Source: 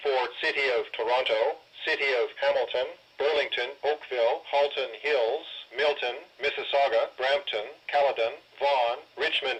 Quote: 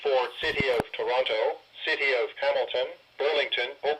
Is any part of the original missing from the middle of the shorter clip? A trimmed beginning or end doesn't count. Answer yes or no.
no